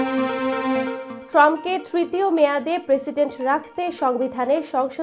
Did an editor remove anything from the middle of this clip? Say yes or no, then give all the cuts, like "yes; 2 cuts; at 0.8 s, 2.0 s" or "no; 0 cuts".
no; 0 cuts